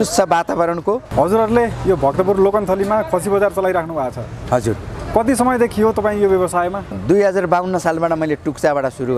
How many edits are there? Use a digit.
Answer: 2